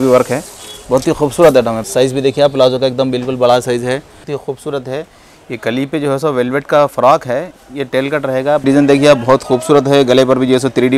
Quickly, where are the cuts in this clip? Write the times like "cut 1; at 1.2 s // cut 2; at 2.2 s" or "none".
cut 1; at 1.8 s // cut 2; at 4.2 s // cut 3; at 8.6 s

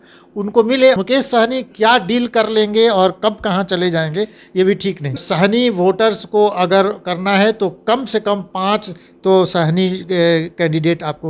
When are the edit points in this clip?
cut 1; at 1.0 s // cut 2; at 5.2 s

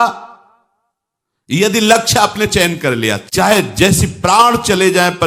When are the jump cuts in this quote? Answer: cut 1; at 3.2 s

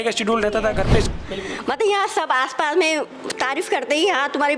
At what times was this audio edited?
cut 1; at 1.1 s

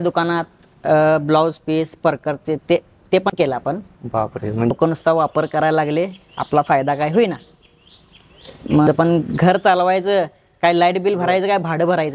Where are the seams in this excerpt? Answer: cut 1; at 4.7 s // cut 2; at 8.9 s

